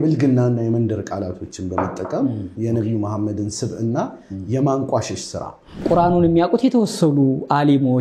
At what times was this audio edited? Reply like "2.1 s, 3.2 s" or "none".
2.5 s, 5.8 s